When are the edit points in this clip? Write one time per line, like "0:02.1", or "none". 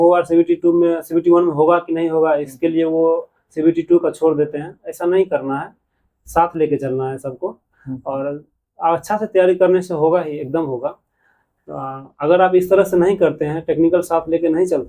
none